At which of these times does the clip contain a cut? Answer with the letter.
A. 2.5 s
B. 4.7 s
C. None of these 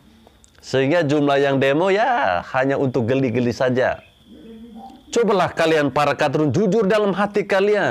B